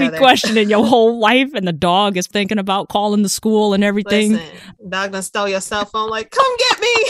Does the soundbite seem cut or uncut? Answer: uncut